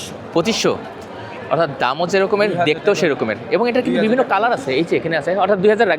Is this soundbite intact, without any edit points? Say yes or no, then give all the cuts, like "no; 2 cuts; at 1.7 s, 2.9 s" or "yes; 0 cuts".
yes; 0 cuts